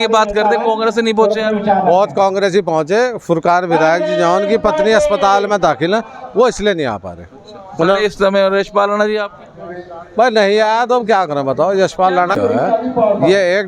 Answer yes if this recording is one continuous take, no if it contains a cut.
yes